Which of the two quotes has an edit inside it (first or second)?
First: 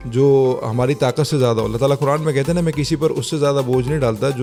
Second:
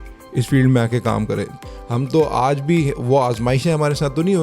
second